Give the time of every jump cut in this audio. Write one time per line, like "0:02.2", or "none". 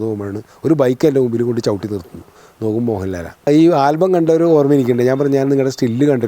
0:03.5